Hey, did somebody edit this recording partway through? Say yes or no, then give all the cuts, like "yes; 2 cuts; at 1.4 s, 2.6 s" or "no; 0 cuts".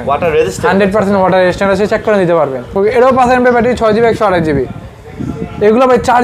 yes; 1 cut; at 2.7 s